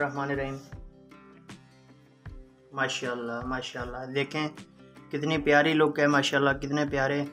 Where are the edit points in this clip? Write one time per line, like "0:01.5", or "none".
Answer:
none

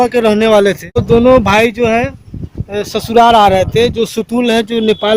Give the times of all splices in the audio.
0:01.0

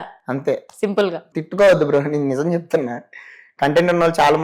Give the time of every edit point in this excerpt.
0:01.3

